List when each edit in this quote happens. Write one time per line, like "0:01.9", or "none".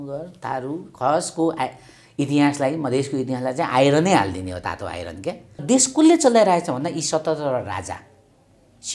0:05.6